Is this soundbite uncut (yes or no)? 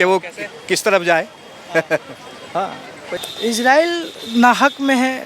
no